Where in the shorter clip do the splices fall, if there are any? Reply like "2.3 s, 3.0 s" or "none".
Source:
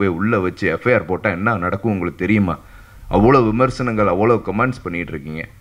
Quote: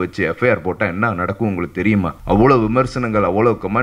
2.2 s